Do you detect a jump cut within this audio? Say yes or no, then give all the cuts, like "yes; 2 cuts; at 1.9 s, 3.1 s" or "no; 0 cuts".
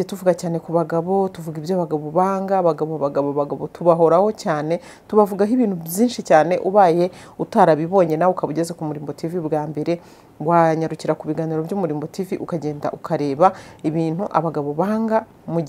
no; 0 cuts